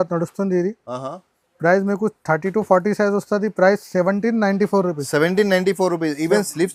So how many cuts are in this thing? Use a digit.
0